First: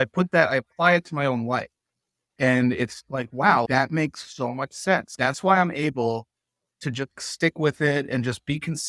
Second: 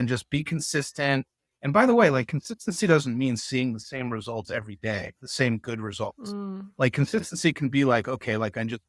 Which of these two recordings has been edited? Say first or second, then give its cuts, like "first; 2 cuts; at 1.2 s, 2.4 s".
first; 4 cuts; at 2.3 s, 3.7 s, 5.1 s, 7.1 s